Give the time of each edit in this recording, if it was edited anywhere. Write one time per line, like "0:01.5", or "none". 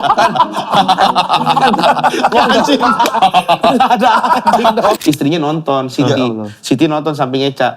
0:05.0